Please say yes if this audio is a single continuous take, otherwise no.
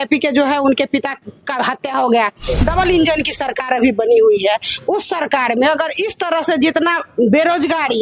no